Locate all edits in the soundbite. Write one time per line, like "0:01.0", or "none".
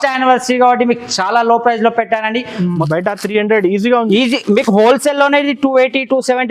0:02.9

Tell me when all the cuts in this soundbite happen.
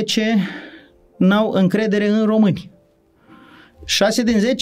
none

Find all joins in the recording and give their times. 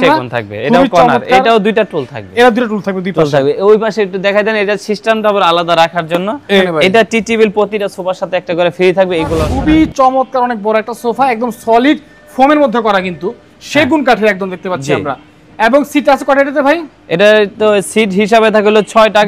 0:06.6
0:09.5

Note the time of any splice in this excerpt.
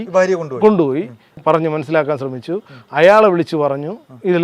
0:01.4

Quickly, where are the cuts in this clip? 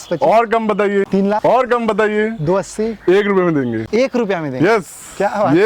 none

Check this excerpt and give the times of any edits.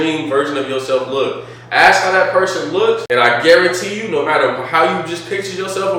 0:03.0

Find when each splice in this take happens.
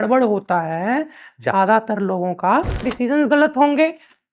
0:02.8

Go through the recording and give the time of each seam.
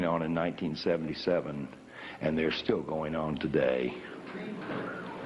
0:04.2

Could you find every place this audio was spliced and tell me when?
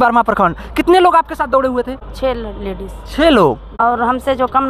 0:03.7

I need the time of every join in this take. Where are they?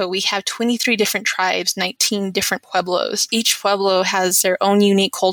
0:03.2

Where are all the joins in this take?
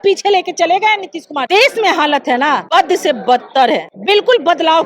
0:01.4
0:02.6
0:03.9

